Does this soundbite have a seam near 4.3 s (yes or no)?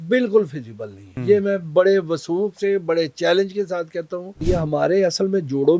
yes